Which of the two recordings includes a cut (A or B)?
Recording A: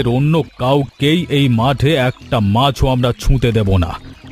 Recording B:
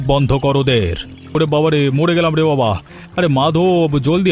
B